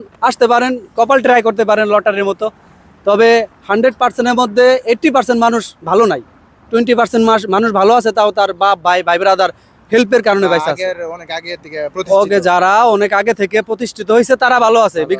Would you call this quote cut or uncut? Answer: uncut